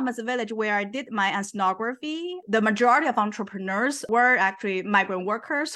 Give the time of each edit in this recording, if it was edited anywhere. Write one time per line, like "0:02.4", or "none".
0:04.1